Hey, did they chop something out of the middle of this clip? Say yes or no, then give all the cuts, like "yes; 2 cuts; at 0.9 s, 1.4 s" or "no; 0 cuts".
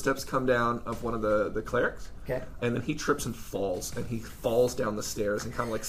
no; 0 cuts